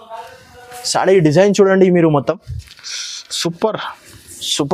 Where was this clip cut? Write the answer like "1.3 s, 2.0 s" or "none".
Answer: none

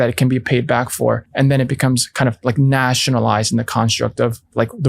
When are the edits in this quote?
1.3 s

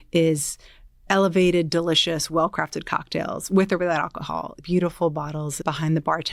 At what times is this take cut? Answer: 4.5 s

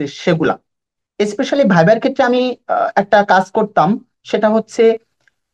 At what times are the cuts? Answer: none

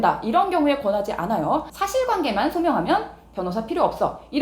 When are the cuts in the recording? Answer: 1.7 s

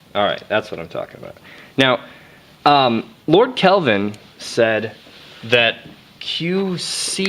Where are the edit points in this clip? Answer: 3.7 s

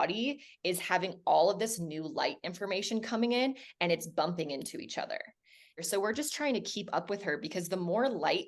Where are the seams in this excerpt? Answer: 5.8 s

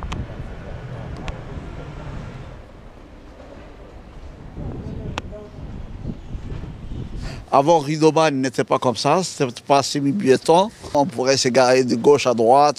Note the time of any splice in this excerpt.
none

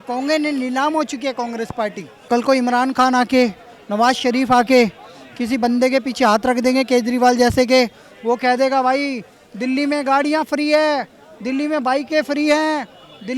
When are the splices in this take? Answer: 2.3 s

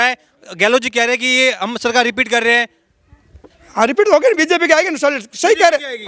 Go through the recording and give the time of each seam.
none

